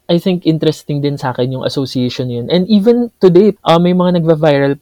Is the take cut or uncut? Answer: cut